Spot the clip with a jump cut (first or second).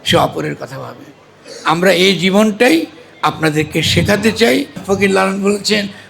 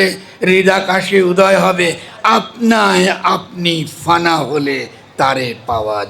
first